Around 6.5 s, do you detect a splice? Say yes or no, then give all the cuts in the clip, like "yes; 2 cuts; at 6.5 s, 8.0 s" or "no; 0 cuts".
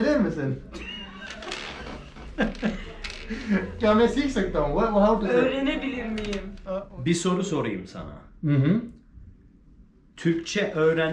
yes; 1 cut; at 6.5 s